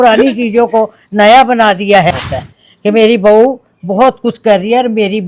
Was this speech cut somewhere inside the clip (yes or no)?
yes